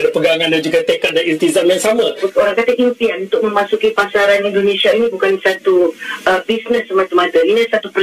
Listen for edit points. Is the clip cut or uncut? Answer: cut